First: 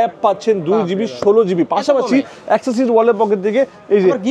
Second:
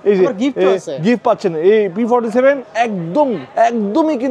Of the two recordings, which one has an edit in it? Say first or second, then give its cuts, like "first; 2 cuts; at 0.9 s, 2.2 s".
second; 1 cut; at 2.9 s